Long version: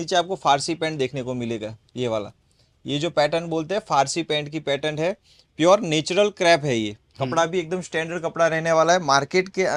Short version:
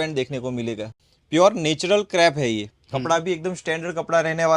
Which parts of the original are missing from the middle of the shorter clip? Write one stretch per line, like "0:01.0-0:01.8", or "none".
0:01.8-0:05.3